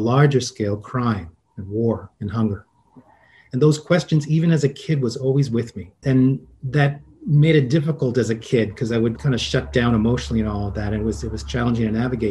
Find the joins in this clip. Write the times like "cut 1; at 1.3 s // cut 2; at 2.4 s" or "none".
cut 1; at 6.0 s // cut 2; at 9.2 s